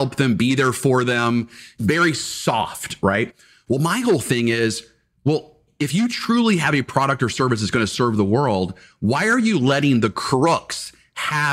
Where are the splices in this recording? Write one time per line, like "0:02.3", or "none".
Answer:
0:01.7
0:05.7